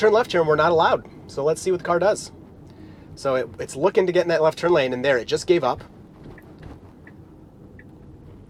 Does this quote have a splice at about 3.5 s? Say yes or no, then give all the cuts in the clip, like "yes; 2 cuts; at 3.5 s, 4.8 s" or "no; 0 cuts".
no; 0 cuts